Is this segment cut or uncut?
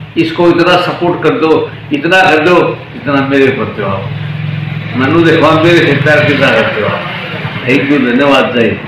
uncut